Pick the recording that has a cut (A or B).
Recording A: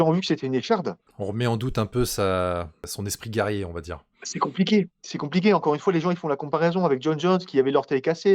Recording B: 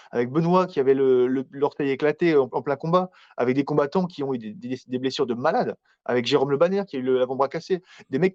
A